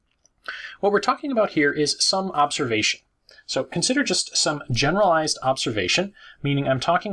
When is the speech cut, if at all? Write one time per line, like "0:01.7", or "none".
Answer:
0:05.5